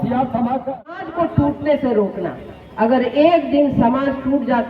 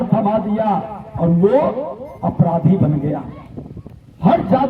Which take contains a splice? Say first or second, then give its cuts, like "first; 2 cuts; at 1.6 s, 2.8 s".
first; 1 cut; at 1.1 s